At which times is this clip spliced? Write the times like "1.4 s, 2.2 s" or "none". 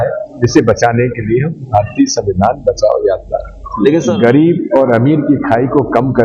4.0 s